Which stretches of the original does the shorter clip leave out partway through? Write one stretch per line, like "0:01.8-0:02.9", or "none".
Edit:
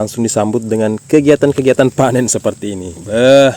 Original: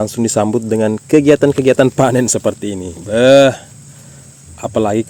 none